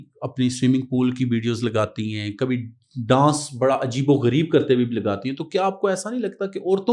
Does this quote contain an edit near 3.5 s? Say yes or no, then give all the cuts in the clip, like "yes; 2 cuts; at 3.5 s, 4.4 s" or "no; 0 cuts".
no; 0 cuts